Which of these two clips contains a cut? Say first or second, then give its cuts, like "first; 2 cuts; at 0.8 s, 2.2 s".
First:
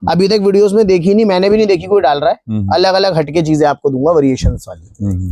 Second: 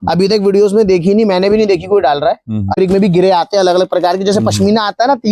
second; 1 cut; at 2.7 s